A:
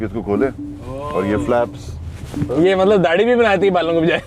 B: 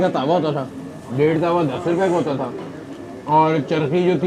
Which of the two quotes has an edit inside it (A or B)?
A